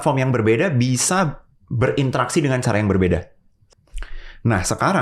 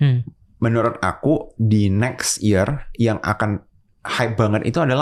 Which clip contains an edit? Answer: first; 1 cut; at 3.5 s

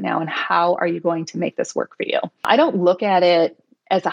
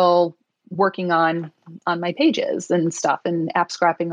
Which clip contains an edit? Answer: first; 1 cut; at 2.5 s

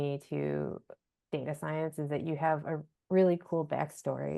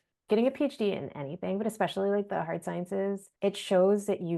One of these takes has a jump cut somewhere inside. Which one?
second; 1 cut; at 3.3 s

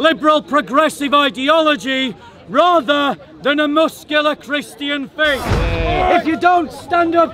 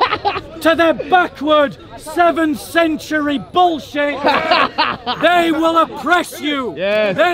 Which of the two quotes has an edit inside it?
first; 1 cut; at 5.6 s

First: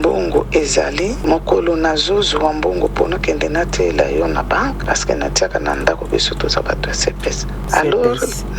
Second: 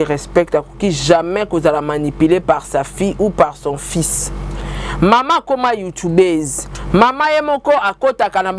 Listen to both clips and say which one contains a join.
first; 3 cuts; at 1.2 s, 4.8 s, 7.5 s

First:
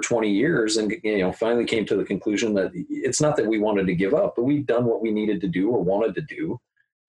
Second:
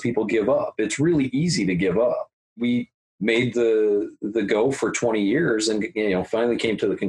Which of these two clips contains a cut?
second; 1 cut; at 2.7 s

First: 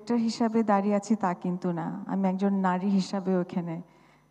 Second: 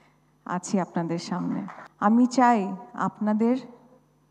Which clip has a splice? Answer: second; 1 cut; at 1.8 s

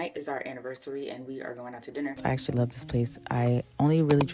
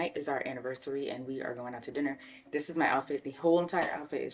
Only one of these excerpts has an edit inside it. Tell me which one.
first; 1 cut; at 2.2 s

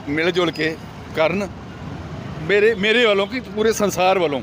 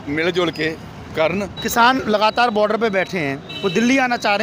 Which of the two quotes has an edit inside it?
second; 1 cut; at 1.6 s

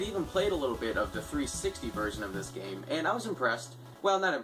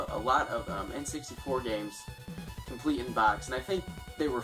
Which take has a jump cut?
second; 1 cut; at 2.4 s

